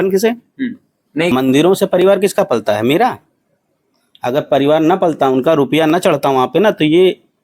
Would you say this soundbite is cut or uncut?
cut